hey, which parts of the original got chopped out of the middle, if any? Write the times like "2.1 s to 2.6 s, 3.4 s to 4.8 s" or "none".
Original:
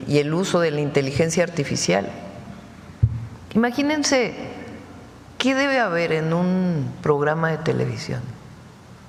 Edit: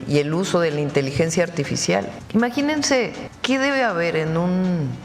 2.2 s to 3.4 s, 4.5 s to 5.2 s